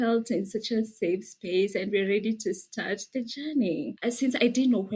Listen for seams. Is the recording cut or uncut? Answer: cut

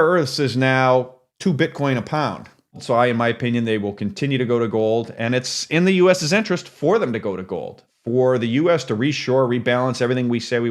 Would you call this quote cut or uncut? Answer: cut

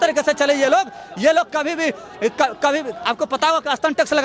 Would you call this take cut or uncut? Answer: uncut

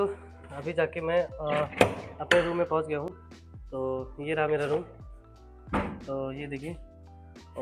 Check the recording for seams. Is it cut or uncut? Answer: uncut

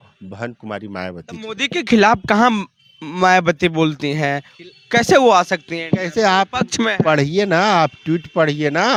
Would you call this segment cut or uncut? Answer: uncut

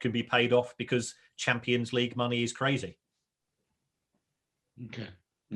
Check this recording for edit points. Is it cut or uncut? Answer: uncut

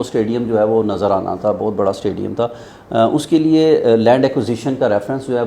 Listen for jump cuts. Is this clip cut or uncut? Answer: uncut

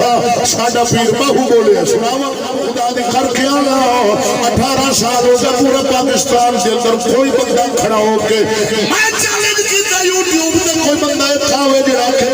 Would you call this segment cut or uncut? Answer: cut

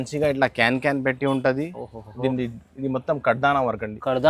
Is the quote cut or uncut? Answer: uncut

